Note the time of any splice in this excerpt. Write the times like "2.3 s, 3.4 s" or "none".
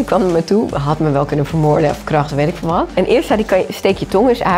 none